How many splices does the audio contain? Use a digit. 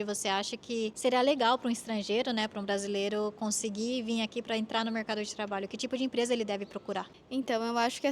2